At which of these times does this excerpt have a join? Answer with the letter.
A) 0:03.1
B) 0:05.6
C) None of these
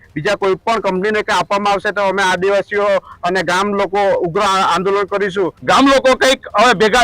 B